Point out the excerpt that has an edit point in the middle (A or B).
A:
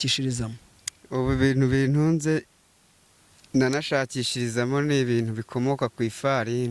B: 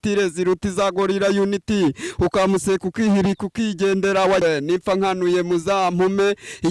B